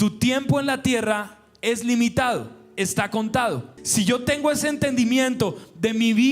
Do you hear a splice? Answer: yes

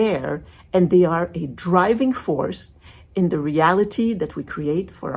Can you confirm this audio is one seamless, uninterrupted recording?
yes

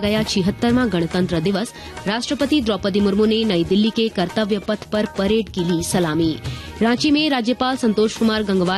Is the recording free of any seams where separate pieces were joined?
yes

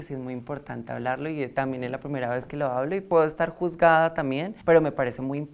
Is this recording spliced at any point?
yes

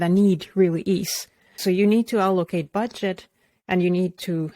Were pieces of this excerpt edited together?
yes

